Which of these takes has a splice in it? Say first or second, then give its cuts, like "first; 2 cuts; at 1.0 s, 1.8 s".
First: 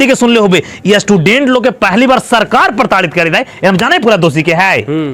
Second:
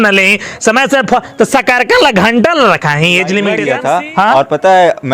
second; 1 cut; at 3.7 s